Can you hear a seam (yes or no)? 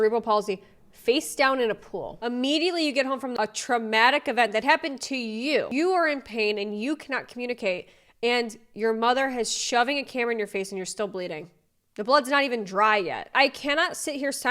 yes